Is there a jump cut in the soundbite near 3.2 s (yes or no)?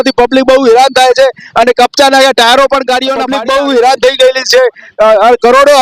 yes